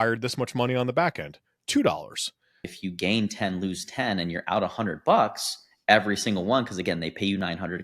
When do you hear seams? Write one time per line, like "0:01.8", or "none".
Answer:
0:02.6